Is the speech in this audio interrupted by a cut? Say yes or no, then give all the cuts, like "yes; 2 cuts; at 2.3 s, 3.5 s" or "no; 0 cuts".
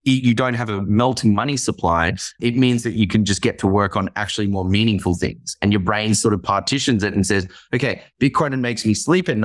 yes; 1 cut; at 2.4 s